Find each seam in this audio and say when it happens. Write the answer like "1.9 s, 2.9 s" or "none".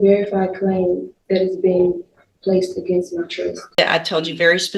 3.8 s